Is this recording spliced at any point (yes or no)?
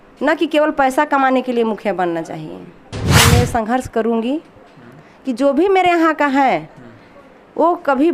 yes